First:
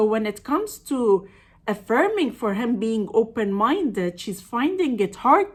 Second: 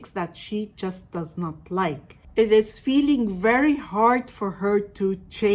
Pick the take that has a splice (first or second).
second